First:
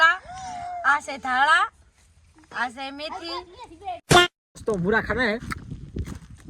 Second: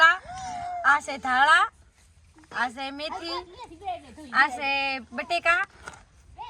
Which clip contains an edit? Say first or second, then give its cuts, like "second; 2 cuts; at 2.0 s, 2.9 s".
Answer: first; 2 cuts; at 3.9 s, 4.6 s